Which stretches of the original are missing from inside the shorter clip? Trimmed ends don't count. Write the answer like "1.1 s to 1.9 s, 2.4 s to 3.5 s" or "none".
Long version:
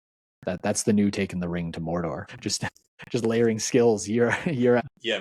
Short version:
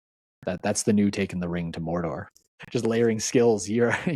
2.3 s to 2.7 s